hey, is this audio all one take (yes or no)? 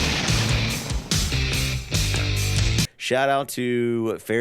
no